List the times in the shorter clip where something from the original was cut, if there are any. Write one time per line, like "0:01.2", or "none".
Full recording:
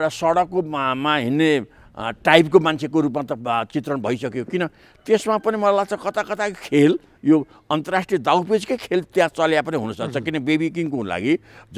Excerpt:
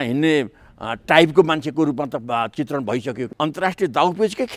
0:03.2